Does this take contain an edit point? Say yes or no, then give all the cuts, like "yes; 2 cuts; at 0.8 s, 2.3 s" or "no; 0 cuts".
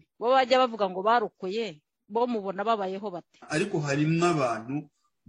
yes; 1 cut; at 3.4 s